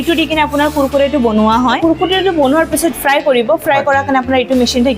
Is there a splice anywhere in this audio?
yes; 2 cuts; at 1.8 s, 2.9 s

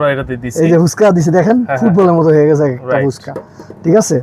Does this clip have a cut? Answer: no; 0 cuts

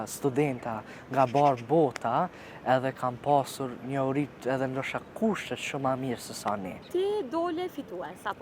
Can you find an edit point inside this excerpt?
yes; 1 cut; at 6.8 s

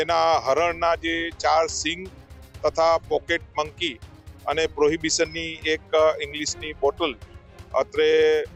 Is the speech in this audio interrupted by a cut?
no; 0 cuts

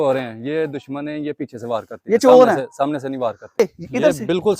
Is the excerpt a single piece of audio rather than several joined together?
no; 1 cut; at 3.6 s

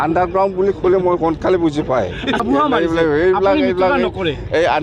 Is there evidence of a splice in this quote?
yes; 1 cut; at 2.4 s

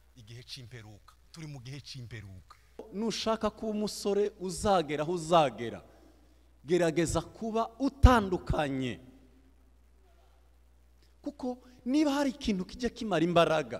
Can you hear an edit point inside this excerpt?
yes; 1 cut; at 2.9 s

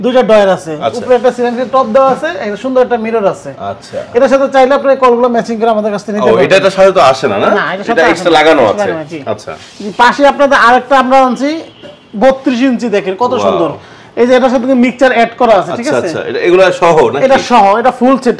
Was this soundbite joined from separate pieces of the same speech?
no; 0 cuts

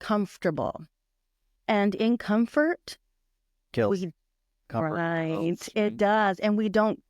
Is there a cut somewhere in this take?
no; 0 cuts

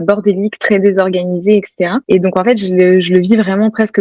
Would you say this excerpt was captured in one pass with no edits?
yes; 0 cuts

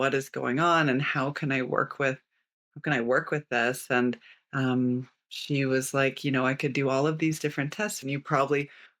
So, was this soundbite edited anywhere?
yes; 1 cut; at 8.0 s

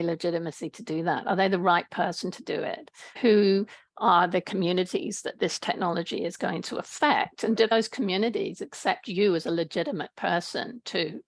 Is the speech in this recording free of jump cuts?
no; 1 cut; at 3.1 s

